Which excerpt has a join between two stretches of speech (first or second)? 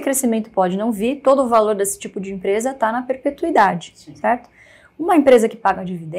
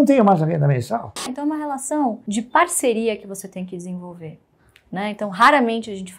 second